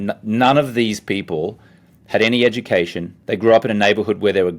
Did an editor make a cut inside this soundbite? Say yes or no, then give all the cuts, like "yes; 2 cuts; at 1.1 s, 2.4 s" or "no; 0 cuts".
yes; 1 cut; at 3.1 s